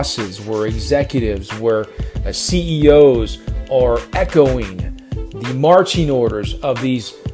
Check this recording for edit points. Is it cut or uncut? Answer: uncut